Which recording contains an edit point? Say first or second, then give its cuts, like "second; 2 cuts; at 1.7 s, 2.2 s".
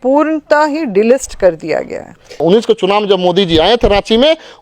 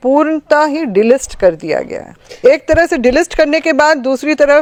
first; 1 cut; at 2.4 s